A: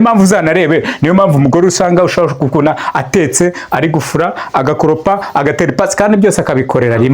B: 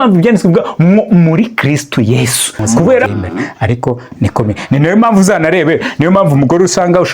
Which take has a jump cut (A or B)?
B